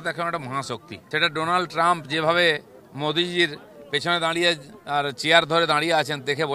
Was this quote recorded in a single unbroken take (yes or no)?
no